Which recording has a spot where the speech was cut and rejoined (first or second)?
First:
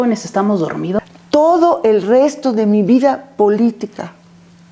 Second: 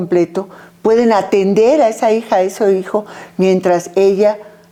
first